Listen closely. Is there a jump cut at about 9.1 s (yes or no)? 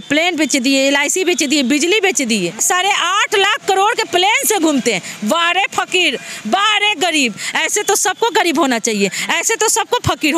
no